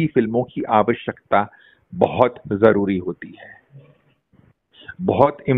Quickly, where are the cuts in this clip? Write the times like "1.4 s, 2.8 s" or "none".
none